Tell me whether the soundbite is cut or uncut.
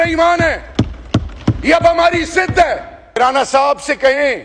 cut